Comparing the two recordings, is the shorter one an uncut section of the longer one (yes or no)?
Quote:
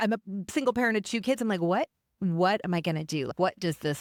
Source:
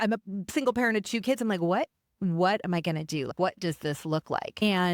yes